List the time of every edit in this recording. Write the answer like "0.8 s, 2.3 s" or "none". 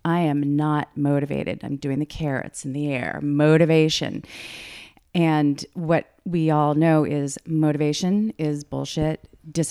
4.9 s